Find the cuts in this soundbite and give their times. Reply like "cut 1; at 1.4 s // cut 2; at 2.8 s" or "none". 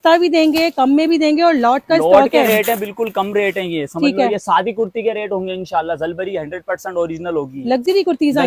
none